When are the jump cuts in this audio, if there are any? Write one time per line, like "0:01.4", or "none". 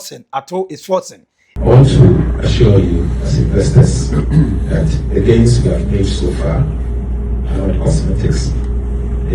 0:01.5